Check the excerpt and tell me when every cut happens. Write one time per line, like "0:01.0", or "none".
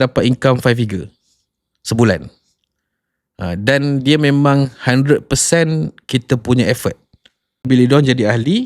0:07.7